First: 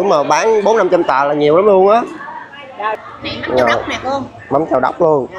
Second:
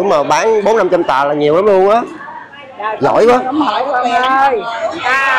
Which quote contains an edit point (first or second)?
first